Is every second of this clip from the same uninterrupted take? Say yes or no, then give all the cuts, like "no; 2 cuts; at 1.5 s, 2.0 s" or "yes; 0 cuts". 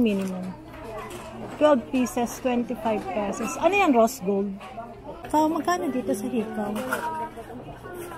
no; 1 cut; at 5.2 s